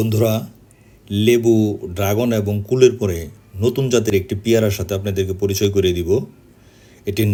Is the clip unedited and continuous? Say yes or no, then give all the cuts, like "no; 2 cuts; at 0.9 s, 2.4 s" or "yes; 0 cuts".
yes; 0 cuts